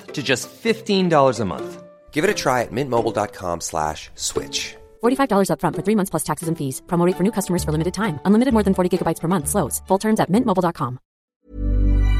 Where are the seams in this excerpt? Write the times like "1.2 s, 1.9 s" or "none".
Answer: 11.2 s